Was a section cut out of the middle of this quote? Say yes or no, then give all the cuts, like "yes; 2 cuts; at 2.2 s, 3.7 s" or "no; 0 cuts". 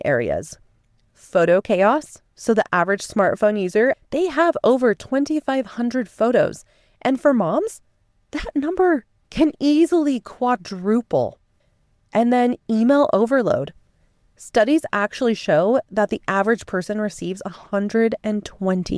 yes; 1 cut; at 4.0 s